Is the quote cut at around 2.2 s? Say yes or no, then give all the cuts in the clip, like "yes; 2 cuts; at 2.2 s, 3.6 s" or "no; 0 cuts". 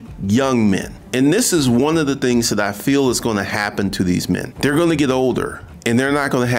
no; 0 cuts